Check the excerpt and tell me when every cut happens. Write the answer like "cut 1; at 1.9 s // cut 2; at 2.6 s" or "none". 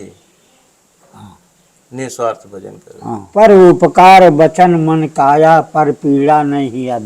cut 1; at 3.3 s